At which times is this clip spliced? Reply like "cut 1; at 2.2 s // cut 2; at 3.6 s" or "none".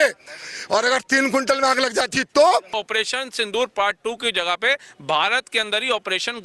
cut 1; at 2.8 s